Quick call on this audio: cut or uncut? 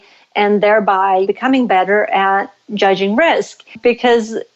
cut